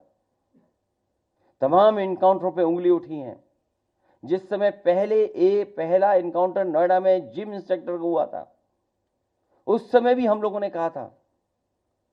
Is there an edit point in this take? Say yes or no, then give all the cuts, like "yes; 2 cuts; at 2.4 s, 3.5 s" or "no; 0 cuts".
no; 0 cuts